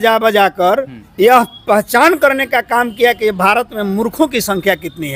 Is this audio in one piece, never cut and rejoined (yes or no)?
yes